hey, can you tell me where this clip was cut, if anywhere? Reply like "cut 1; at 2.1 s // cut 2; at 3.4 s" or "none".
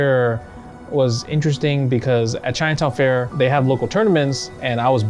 cut 1; at 3.3 s